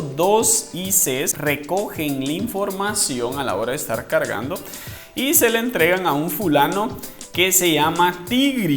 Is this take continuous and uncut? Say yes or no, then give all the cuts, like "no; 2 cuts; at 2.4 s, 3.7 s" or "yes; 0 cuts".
no; 1 cut; at 1.3 s